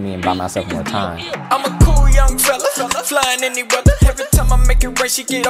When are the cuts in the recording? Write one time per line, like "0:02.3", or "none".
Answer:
0:01.2

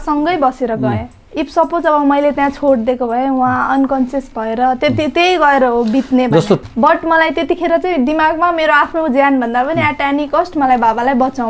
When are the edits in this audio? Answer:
0:06.6

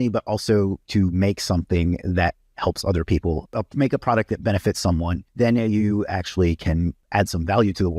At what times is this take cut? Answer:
0:00.8
0:03.5
0:05.2
0:07.0

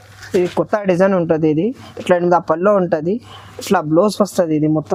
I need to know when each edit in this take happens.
none

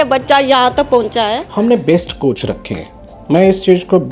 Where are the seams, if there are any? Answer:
0:01.4

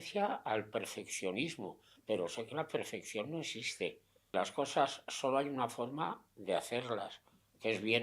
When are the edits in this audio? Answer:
0:04.3

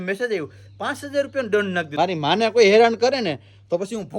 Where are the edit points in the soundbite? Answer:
0:01.9

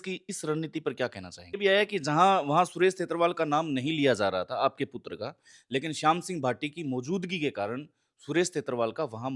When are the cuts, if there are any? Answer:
0:01.6

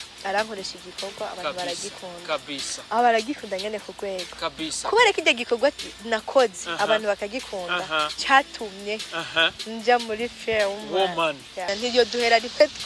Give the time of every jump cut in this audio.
0:11.7

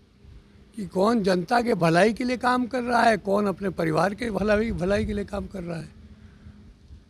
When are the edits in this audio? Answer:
none

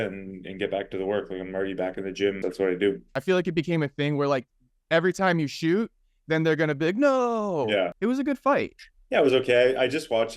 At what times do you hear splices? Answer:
0:02.4
0:03.1
0:07.9

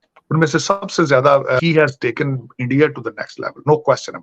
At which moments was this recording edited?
0:01.6

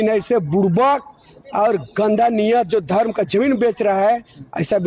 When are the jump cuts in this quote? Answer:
none

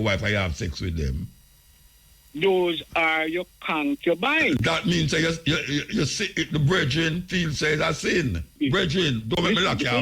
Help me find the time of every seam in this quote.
0:08.6

